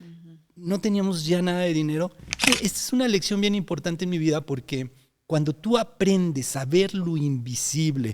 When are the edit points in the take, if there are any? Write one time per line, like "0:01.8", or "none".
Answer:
0:02.4